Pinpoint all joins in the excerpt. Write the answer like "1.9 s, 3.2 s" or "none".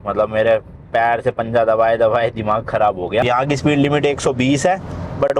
3.2 s